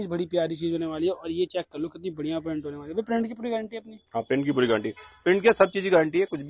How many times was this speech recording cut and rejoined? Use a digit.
0